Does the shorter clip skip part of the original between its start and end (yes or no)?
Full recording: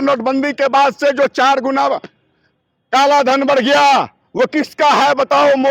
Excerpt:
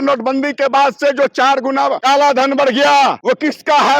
yes